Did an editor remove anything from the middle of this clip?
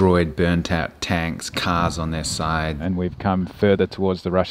yes; 1 cut; at 2.8 s

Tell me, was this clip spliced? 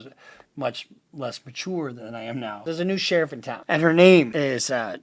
yes; 3 cuts; at 2.6 s, 3.5 s, 4.3 s

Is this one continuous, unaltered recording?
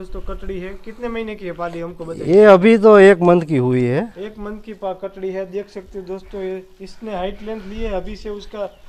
yes; 0 cuts

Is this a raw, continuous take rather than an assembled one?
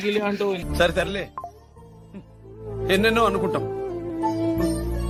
yes; 0 cuts

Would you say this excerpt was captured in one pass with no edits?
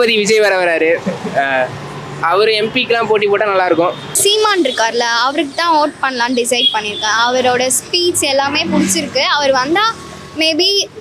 no; 1 cut; at 4.1 s

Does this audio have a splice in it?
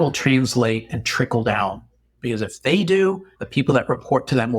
yes; 1 cut; at 3.3 s

